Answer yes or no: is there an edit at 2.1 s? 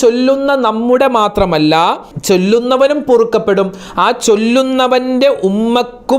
yes